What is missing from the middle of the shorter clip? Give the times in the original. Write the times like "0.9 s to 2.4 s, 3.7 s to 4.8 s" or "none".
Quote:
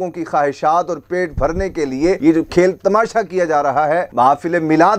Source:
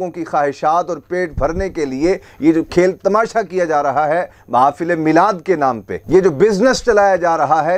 2.2 s to 2.4 s, 4.3 s to 4.4 s